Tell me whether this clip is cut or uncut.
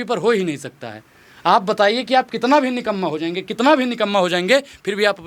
uncut